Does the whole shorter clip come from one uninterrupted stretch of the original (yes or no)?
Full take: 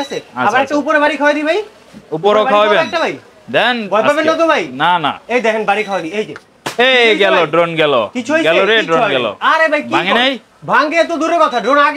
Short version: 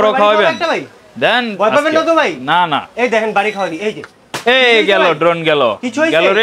yes